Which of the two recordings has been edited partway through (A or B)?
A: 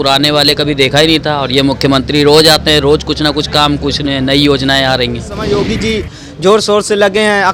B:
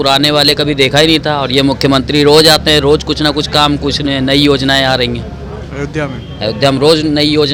A